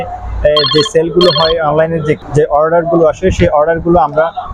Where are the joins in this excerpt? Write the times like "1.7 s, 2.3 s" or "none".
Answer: none